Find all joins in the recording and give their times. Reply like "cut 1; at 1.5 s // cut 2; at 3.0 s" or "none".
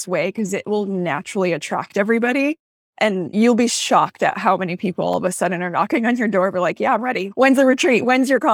cut 1; at 3.3 s // cut 2; at 7.3 s